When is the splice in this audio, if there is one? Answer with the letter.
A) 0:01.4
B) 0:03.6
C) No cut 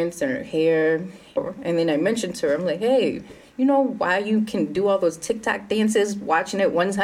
A